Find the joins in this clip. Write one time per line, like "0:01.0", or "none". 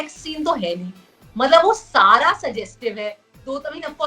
none